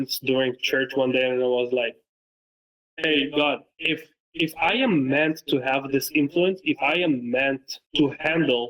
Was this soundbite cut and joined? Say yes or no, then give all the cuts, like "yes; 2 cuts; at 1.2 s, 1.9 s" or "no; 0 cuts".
yes; 1 cut; at 7.8 s